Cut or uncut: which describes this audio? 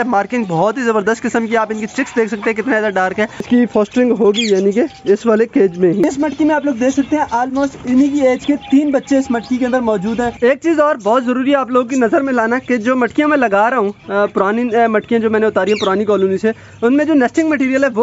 cut